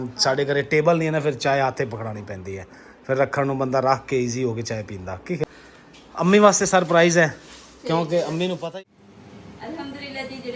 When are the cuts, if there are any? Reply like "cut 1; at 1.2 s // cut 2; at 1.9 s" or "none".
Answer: cut 1; at 5.6 s // cut 2; at 8.6 s